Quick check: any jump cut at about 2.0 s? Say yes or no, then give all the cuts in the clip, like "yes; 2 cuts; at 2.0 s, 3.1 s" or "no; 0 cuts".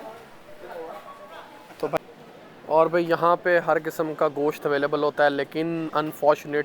yes; 1 cut; at 2.0 s